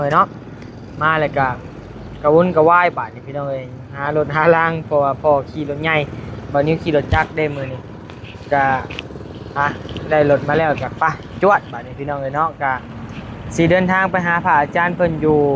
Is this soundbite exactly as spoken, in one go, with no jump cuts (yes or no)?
yes